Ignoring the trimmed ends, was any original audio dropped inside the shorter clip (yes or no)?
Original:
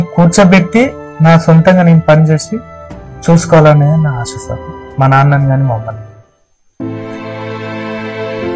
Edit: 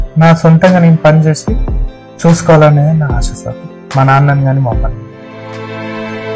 yes